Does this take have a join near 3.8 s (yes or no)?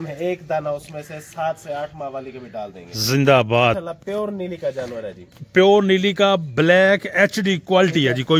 yes